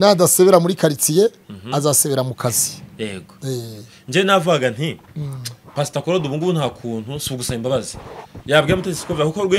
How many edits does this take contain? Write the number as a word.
zero